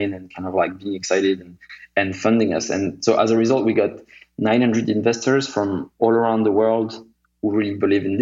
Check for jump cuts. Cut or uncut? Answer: uncut